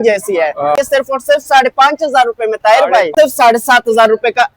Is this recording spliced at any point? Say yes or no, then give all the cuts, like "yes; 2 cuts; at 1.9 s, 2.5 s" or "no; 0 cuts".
yes; 2 cuts; at 0.7 s, 3.1 s